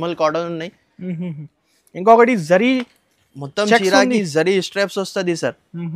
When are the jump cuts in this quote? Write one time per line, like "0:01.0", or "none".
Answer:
none